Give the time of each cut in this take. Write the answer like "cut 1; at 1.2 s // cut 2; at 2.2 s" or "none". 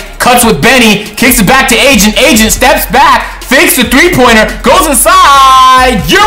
none